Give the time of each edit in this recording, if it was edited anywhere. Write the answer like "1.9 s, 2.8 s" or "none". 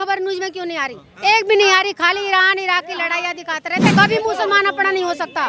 3.9 s